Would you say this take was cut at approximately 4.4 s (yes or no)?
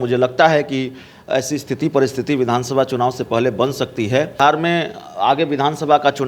yes